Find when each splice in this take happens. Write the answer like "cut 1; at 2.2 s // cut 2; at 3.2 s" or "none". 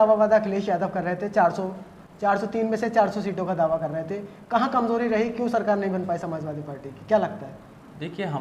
none

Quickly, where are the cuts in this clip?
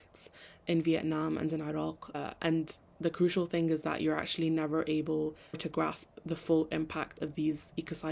cut 1; at 2.8 s // cut 2; at 7.1 s

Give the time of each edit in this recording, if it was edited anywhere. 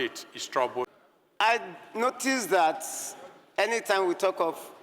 cut 1; at 1.1 s

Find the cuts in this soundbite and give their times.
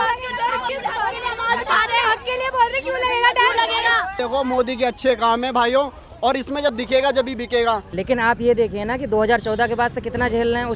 cut 1; at 4.2 s // cut 2; at 7.9 s

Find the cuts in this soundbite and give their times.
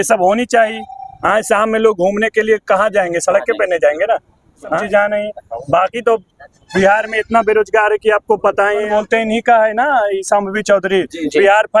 cut 1; at 4.8 s // cut 2; at 8.9 s

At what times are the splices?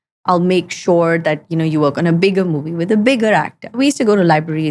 cut 1; at 3.8 s

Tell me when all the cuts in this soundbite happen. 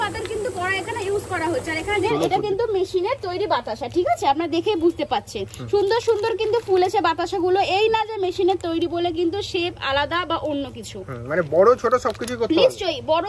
cut 1; at 2.0 s

